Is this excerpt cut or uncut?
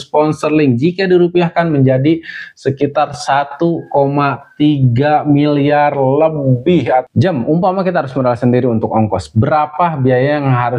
cut